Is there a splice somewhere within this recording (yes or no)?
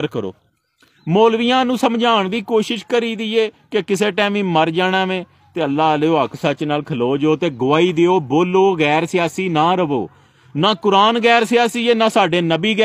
no